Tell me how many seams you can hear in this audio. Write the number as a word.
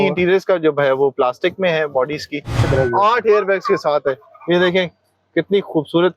one